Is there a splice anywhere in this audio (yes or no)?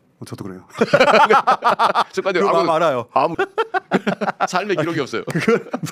yes